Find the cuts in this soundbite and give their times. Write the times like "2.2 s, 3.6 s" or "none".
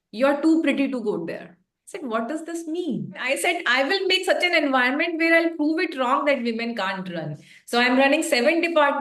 3.2 s